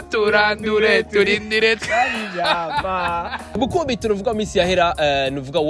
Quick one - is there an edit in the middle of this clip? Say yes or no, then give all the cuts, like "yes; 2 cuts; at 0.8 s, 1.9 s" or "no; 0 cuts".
yes; 1 cut; at 3.5 s